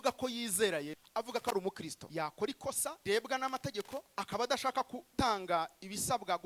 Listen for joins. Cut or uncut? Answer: cut